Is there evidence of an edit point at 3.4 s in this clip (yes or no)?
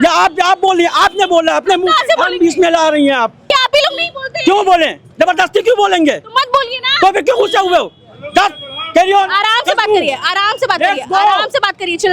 yes